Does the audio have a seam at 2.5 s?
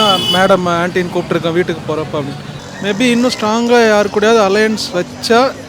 yes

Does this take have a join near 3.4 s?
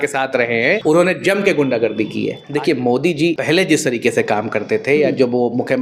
yes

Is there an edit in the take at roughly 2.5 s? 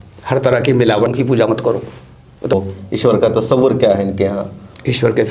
yes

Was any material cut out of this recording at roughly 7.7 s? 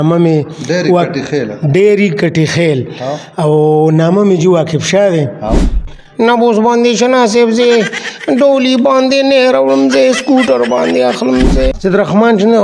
no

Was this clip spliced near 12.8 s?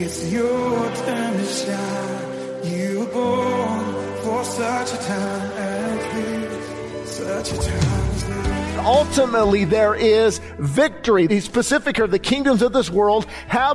no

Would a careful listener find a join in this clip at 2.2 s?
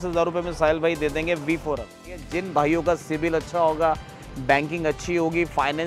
yes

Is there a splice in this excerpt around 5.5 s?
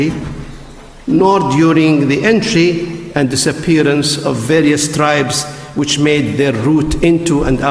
no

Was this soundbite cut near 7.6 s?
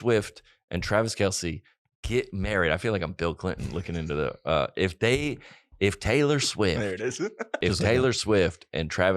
yes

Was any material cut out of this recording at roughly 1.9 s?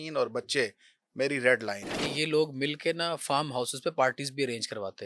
yes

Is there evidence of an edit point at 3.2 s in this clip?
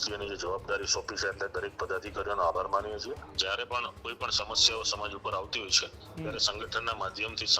yes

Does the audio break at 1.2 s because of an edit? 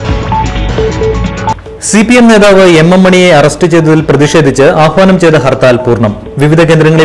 yes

